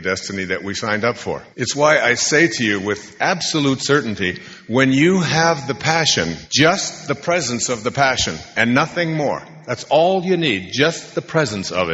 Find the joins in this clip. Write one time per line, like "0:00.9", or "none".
0:01.5